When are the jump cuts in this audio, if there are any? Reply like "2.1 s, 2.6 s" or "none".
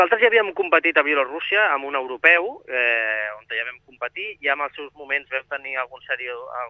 none